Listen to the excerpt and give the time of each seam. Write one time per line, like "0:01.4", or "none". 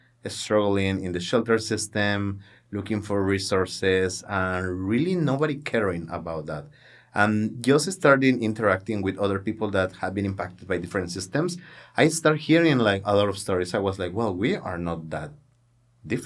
none

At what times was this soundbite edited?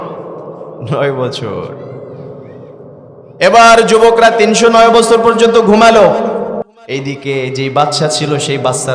0:06.6

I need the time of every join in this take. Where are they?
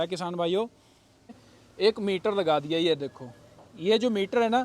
0:01.3

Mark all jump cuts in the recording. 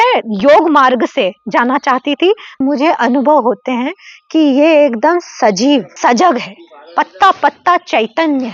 0:02.6
0:05.9

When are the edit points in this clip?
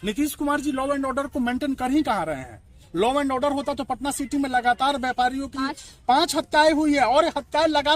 none

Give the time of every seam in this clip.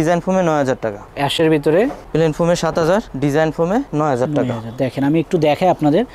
none

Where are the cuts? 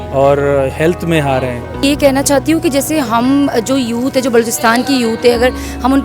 0:01.8

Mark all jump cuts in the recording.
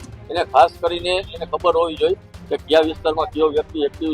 none

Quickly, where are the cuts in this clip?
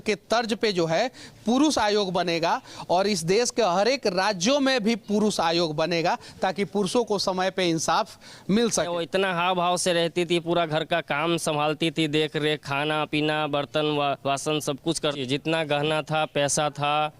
0:08.9
0:15.2

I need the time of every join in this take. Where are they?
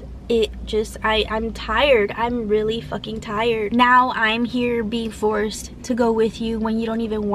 0:03.7

